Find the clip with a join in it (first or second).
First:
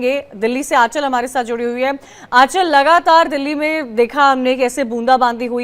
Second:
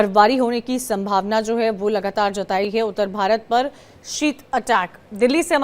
second